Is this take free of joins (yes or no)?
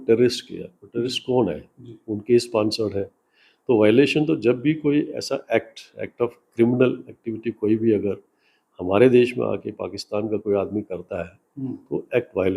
yes